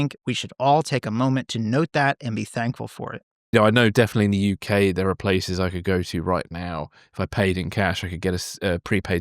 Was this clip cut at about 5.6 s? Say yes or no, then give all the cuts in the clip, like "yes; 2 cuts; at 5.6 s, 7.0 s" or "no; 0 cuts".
no; 1 cut; at 3.5 s